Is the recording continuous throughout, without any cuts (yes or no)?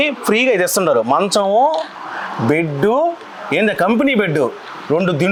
yes